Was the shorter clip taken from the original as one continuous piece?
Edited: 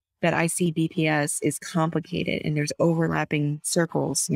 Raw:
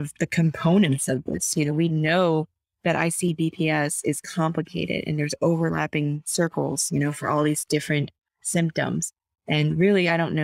yes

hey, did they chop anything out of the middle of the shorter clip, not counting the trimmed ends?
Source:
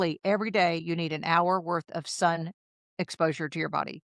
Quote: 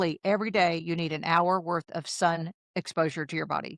yes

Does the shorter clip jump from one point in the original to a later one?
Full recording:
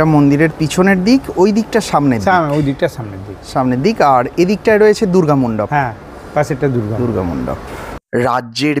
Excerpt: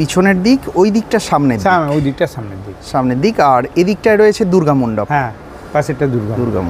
no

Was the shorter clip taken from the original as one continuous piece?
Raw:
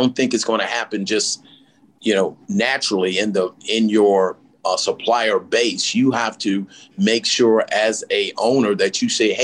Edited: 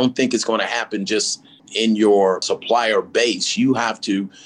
no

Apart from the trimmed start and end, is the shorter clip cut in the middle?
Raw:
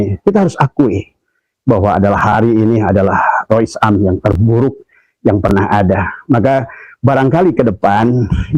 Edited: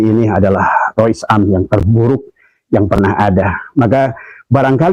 no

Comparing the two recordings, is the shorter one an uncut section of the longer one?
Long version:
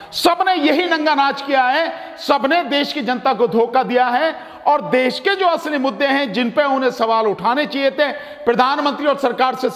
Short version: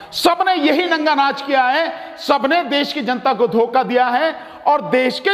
yes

